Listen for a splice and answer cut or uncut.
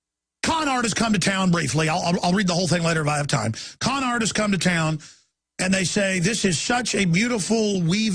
uncut